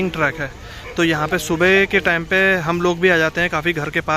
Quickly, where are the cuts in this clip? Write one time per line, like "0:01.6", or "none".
none